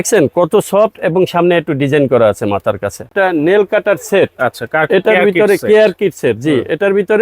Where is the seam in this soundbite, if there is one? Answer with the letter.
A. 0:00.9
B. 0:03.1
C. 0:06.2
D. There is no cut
B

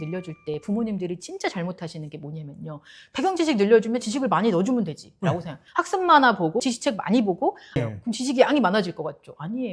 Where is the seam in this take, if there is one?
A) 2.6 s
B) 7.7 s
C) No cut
B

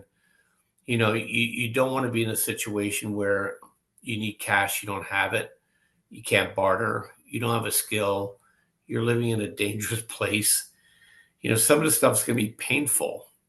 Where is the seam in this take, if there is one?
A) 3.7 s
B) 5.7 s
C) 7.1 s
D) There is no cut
A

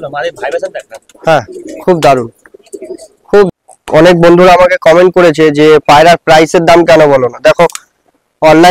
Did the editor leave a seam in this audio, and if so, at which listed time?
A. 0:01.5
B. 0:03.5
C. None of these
B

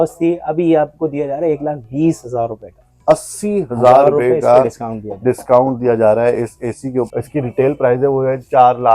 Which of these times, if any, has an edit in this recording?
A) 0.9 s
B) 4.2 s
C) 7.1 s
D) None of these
C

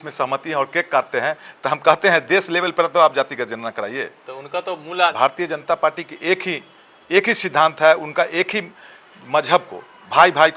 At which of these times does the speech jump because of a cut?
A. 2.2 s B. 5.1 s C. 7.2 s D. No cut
B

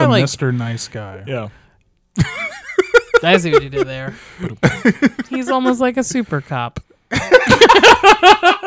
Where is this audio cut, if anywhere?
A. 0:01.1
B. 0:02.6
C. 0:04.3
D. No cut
D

